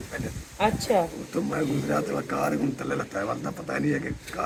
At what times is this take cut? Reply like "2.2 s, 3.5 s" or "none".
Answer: none